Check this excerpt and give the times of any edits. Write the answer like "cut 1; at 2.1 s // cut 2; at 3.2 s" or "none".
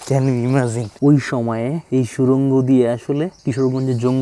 cut 1; at 0.9 s // cut 2; at 1.8 s // cut 3; at 3.4 s